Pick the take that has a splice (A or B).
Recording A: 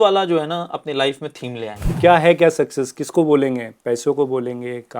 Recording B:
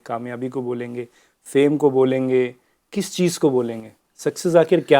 A